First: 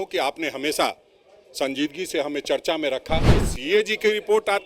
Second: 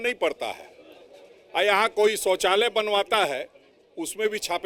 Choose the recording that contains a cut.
first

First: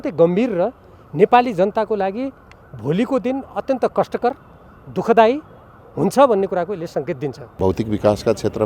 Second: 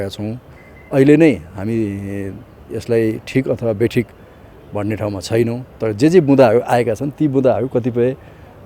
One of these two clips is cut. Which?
first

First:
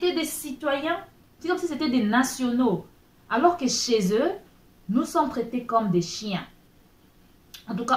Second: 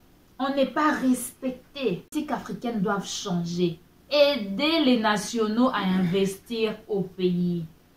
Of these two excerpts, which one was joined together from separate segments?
second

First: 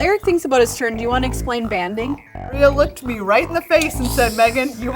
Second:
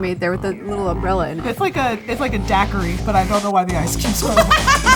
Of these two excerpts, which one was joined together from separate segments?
first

